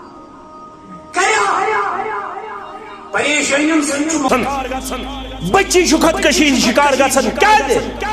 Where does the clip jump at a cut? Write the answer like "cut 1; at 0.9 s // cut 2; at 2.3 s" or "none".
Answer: cut 1; at 4.3 s